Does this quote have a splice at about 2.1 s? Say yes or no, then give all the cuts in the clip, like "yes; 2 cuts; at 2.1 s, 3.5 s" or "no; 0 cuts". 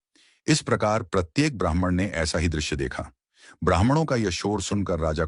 yes; 1 cut; at 2.1 s